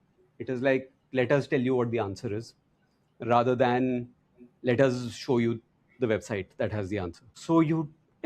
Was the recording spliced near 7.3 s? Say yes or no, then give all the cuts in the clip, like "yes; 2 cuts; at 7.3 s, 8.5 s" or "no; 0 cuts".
yes; 1 cut; at 7.3 s